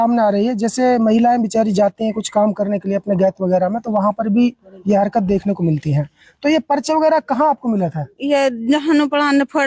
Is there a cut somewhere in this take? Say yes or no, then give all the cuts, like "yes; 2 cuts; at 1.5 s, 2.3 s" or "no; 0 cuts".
no; 0 cuts